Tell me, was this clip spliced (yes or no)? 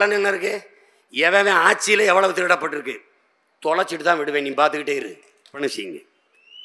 yes